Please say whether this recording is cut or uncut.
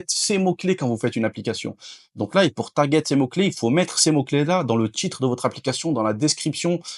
uncut